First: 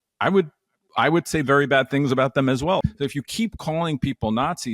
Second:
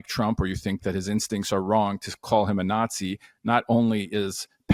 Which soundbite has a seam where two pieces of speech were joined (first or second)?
first